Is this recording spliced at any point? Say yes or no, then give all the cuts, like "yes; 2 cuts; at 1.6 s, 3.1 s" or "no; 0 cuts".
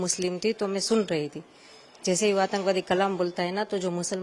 no; 0 cuts